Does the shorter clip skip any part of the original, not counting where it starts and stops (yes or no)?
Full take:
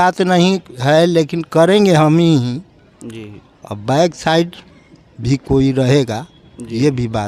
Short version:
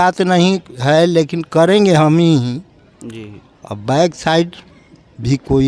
no